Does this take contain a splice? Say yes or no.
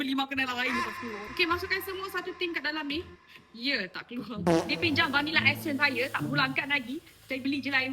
yes